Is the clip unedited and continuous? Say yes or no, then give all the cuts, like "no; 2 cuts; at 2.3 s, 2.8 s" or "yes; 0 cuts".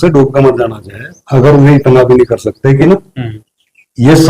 no; 1 cut; at 2.8 s